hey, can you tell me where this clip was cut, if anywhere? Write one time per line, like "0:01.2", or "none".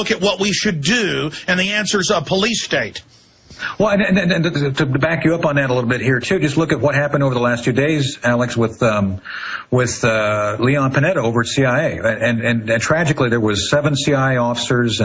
0:02.4